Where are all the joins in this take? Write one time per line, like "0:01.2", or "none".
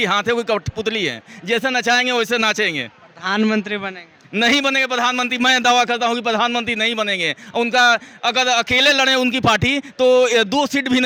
none